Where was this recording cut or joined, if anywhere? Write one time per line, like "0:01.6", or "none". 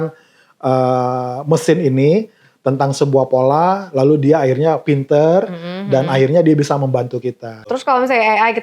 0:07.6